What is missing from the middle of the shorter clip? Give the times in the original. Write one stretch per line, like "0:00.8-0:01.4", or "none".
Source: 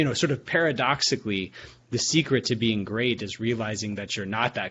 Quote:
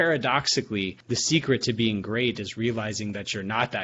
0:01.5-0:01.8